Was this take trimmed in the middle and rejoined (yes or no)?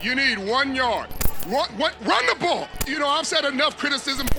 yes